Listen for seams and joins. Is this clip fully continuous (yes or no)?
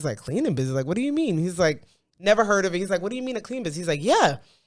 yes